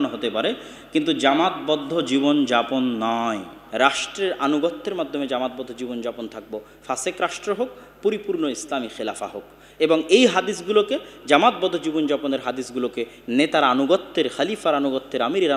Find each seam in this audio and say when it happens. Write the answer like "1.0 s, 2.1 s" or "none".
3.6 s